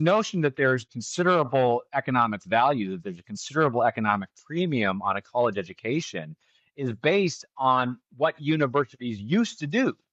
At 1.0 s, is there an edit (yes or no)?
yes